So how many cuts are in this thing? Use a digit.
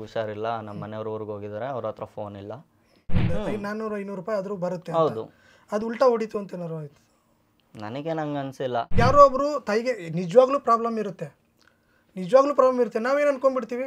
2